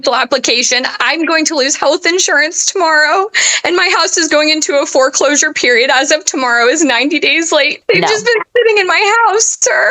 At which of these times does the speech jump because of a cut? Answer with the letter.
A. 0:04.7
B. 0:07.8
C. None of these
B